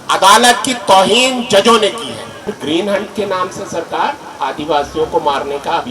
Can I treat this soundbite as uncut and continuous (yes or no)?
no